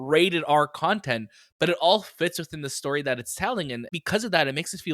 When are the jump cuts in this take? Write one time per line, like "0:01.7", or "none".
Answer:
0:03.9